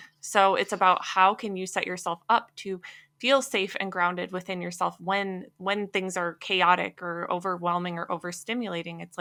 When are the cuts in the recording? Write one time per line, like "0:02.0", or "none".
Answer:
none